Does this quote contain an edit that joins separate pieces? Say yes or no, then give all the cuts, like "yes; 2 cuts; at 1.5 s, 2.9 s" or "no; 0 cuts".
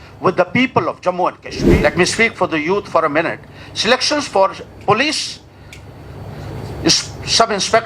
yes; 1 cut; at 1.6 s